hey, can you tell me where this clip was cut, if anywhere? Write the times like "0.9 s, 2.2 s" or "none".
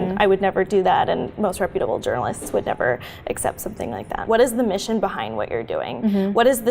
4.2 s